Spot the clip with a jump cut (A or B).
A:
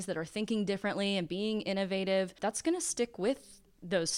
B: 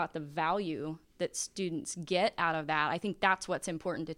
A